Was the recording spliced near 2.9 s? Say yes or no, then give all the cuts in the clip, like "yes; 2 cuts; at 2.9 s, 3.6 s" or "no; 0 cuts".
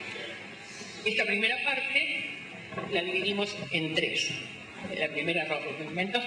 yes; 1 cut; at 2.9 s